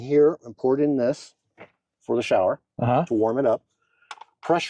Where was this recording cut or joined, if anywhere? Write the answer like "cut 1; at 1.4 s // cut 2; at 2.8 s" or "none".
none